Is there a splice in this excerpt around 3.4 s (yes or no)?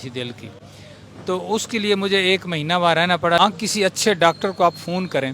yes